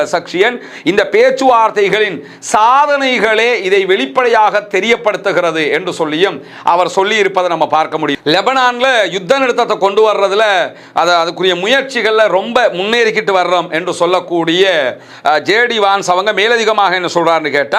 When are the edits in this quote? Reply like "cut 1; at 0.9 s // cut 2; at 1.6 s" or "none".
cut 1; at 8.1 s